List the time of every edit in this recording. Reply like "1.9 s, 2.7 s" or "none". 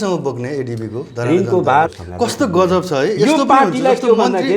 1.9 s